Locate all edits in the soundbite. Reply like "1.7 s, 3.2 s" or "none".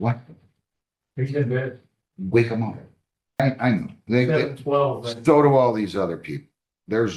3.4 s